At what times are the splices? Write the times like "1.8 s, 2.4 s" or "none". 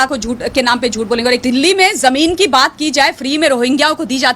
1.4 s